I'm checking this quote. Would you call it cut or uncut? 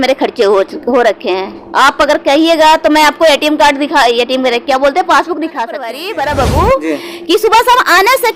cut